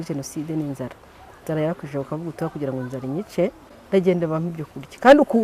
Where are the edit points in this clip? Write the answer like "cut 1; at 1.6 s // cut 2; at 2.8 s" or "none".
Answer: cut 1; at 3.7 s